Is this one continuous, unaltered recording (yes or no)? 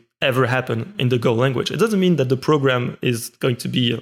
yes